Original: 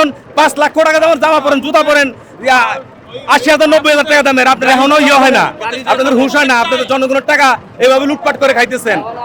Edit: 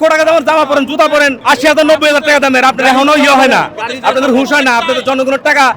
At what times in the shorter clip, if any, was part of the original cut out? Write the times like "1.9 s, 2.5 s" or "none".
1.4 s